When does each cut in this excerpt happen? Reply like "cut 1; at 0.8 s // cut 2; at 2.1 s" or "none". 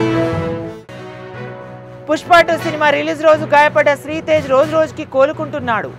none